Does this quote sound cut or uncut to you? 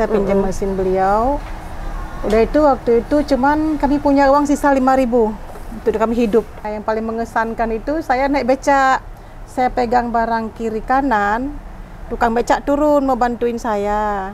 cut